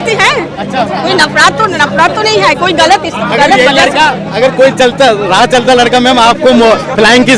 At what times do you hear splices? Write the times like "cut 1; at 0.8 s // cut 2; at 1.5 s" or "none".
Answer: none